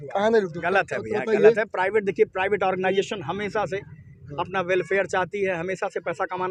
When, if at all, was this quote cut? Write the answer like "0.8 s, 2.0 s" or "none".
none